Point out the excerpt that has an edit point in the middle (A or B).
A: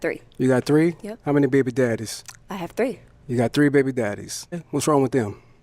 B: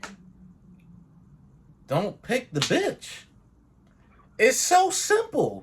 A